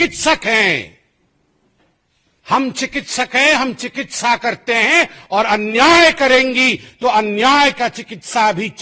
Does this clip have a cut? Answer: no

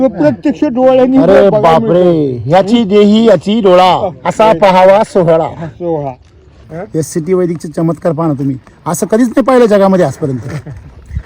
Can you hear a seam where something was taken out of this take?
yes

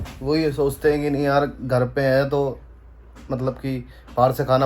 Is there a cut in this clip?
no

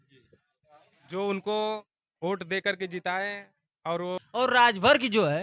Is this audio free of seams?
no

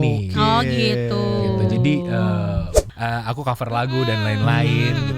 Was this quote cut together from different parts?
yes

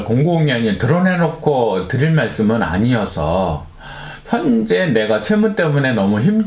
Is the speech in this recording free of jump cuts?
yes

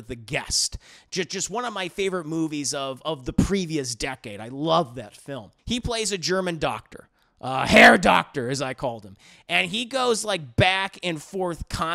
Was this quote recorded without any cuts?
no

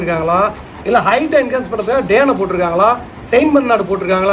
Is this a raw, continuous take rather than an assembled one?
yes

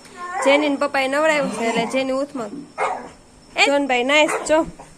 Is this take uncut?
no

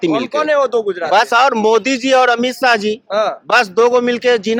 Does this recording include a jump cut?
no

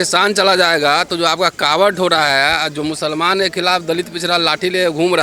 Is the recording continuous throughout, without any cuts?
yes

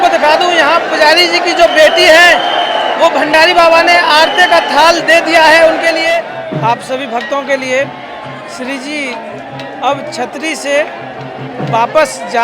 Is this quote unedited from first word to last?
no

